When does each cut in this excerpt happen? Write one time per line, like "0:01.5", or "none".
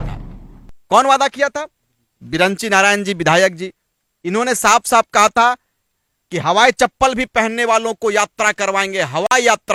none